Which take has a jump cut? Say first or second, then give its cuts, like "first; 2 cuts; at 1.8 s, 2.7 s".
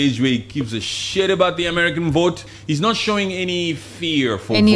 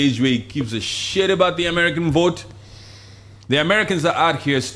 first; 1 cut; at 2.5 s